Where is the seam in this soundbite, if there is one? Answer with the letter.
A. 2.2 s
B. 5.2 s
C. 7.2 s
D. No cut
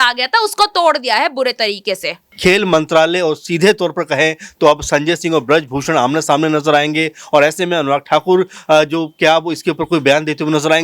A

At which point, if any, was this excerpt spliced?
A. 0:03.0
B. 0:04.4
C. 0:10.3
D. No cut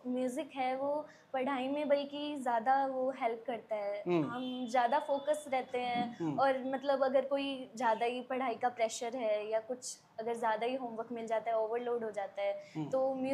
D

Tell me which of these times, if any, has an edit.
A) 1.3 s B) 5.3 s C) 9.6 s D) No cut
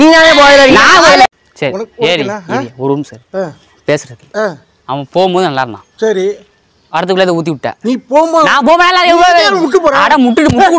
A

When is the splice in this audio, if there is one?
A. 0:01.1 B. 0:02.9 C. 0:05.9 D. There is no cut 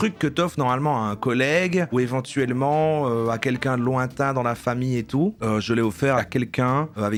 D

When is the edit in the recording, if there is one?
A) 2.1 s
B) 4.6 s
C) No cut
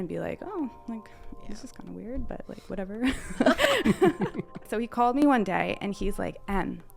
B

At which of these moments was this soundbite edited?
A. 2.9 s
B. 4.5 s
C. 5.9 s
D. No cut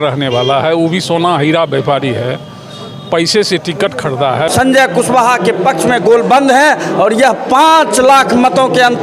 B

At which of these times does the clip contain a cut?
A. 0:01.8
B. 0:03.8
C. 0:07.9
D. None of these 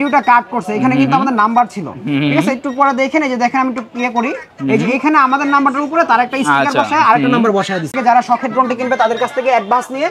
C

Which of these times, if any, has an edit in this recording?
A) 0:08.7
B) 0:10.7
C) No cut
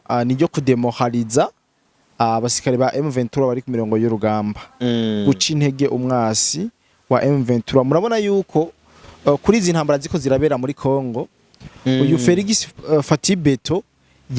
C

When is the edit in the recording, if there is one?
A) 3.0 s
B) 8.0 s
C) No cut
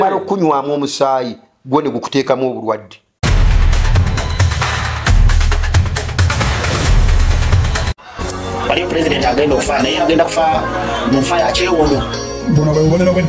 A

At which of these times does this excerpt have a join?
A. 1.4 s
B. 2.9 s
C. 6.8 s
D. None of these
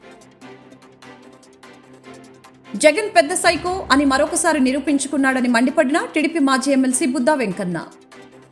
A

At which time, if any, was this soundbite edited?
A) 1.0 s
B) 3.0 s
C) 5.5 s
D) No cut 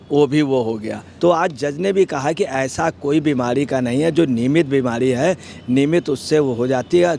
A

